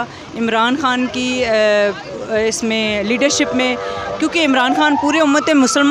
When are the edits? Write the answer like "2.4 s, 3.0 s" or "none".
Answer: none